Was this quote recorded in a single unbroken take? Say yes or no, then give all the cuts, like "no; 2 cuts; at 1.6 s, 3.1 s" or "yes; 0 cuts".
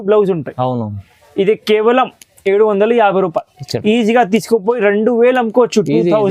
yes; 0 cuts